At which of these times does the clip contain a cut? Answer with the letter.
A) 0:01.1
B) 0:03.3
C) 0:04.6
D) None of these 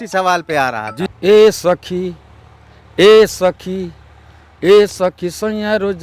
A